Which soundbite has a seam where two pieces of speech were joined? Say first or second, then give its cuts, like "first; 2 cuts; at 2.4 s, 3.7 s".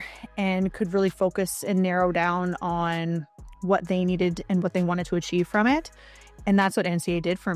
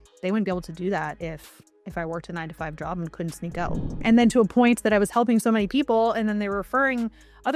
second; 1 cut; at 3.9 s